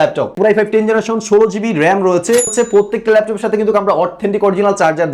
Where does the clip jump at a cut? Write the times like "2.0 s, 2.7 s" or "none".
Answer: 2.5 s